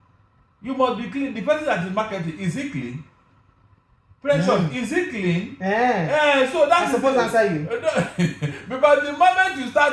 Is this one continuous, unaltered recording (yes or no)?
yes